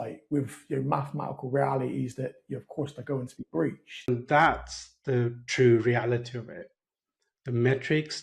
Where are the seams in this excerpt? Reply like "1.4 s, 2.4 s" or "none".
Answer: 4.1 s